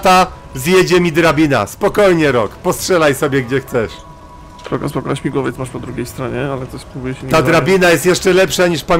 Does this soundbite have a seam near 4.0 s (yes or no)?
no